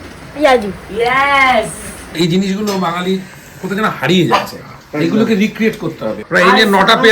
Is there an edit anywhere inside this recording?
yes; 2 cuts; at 2.1 s, 6.2 s

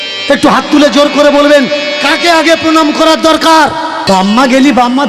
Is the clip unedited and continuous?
no; 1 cut; at 4.0 s

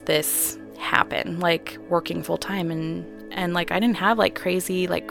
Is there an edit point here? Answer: no; 0 cuts

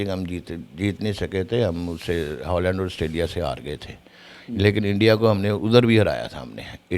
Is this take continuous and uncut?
yes; 0 cuts

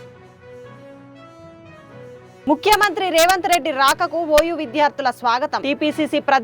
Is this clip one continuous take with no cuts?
no; 1 cut; at 1.0 s

